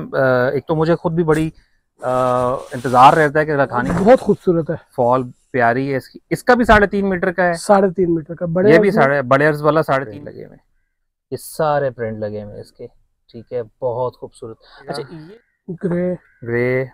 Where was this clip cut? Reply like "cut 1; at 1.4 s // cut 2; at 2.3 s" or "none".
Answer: cut 1; at 3.9 s // cut 2; at 10.1 s // cut 3; at 15.1 s